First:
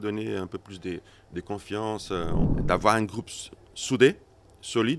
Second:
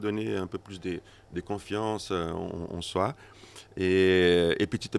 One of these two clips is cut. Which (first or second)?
first